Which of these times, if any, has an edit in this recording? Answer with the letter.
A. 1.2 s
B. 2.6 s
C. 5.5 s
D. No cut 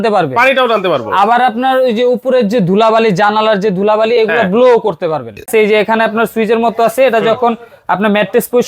C